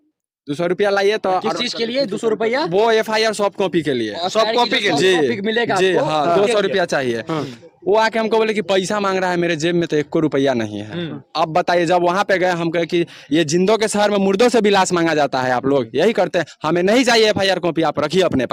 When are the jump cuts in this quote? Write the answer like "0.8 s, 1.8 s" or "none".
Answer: none